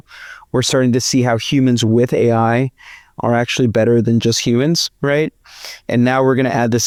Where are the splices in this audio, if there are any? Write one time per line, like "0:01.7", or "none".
none